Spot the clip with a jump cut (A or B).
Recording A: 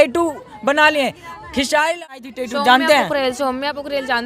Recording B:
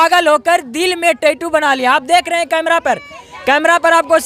A